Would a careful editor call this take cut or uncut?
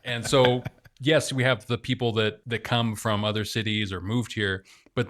cut